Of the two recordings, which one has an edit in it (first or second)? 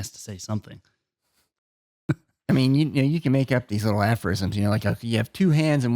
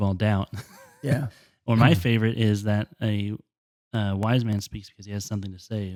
first